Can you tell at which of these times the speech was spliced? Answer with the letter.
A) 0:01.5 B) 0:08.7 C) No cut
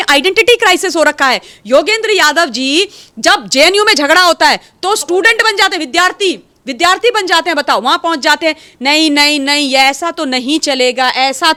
C